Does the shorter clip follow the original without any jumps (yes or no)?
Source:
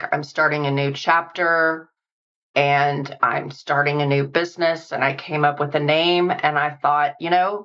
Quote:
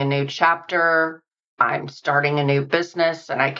no